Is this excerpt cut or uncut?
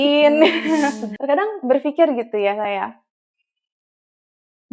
cut